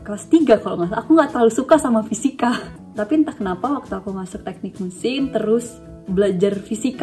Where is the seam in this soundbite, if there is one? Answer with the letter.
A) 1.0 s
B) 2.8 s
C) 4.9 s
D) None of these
B